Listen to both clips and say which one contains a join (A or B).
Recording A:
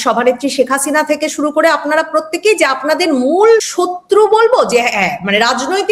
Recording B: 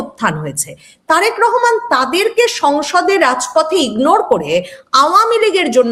A